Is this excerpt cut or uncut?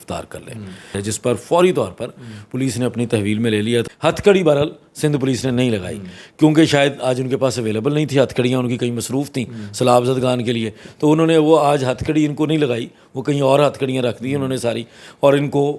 cut